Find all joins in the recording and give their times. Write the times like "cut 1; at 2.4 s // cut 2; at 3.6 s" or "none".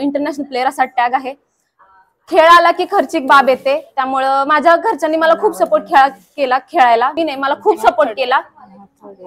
cut 1; at 7.1 s